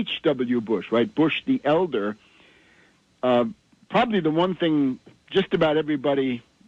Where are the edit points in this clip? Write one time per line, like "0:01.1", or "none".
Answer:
none